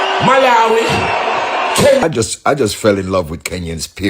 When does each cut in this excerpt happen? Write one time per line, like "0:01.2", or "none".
0:02.0